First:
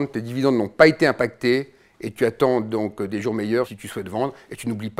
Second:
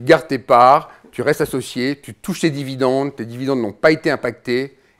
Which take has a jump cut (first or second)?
first